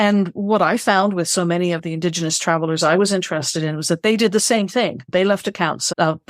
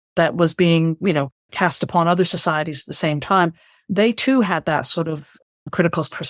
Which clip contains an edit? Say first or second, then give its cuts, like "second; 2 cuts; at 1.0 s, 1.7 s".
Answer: first; 1 cut; at 5.1 s